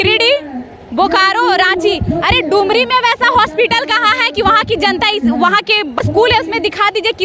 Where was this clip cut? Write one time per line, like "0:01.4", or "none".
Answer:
0:06.0